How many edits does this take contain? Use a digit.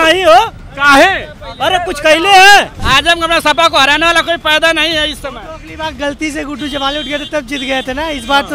1